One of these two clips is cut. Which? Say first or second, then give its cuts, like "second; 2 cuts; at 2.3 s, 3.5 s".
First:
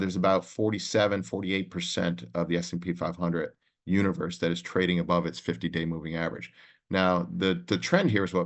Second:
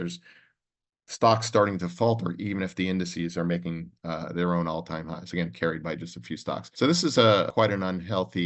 second; 2 cuts; at 6.7 s, 7.5 s